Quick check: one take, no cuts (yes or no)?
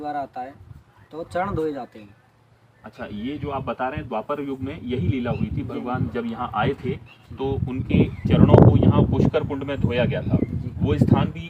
yes